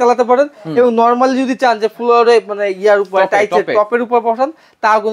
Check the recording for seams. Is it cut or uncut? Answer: uncut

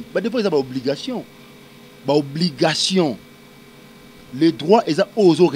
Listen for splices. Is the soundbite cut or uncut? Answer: uncut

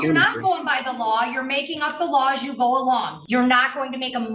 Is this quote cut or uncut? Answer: cut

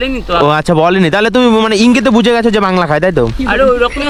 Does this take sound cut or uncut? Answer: uncut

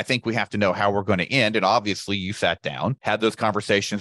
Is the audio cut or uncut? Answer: uncut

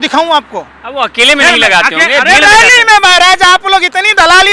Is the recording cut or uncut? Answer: uncut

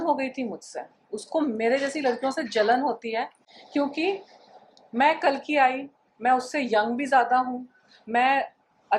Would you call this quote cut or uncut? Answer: uncut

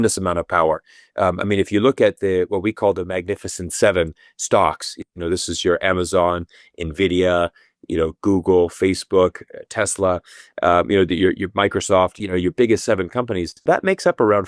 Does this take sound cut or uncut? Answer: cut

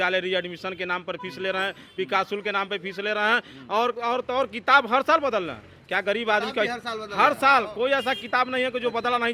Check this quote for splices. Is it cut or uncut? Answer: uncut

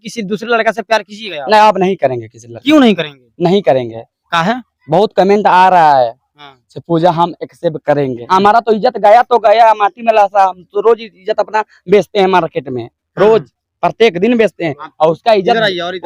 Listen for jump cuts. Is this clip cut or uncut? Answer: uncut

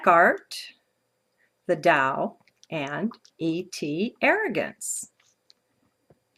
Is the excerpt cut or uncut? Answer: cut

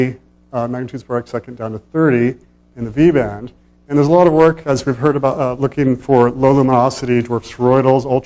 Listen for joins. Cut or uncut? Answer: uncut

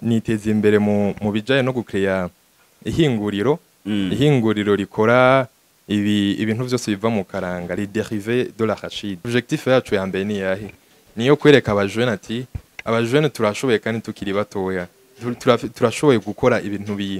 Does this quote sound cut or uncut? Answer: cut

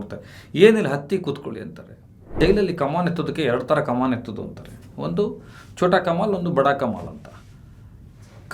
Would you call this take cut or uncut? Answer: cut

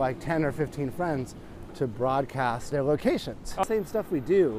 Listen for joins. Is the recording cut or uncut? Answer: cut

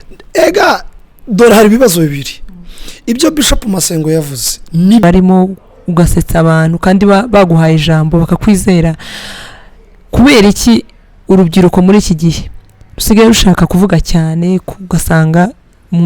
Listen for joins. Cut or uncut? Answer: cut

